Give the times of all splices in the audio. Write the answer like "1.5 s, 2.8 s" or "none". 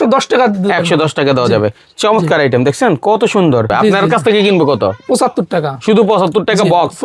3.7 s